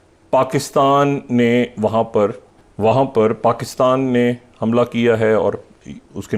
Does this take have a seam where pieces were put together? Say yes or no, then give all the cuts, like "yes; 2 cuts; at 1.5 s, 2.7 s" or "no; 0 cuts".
no; 0 cuts